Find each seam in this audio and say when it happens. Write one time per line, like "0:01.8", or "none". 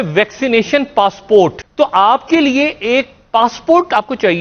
0:01.6